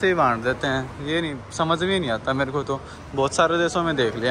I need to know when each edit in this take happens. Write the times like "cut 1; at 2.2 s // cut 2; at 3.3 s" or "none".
none